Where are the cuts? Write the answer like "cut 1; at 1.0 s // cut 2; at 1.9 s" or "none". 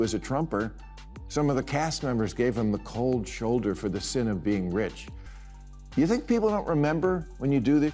none